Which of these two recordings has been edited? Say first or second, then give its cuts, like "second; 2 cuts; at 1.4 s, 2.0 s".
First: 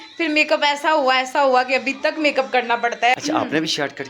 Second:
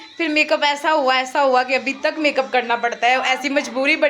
first; 1 cut; at 3.2 s